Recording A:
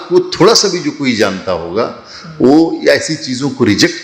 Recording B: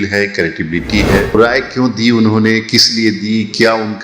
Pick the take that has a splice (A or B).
B